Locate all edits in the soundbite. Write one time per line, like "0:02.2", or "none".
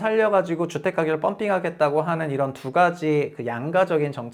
none